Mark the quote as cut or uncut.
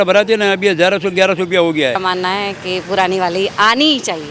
cut